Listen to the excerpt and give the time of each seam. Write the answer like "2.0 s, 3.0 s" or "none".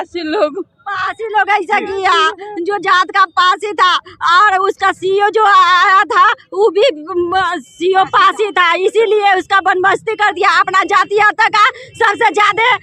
none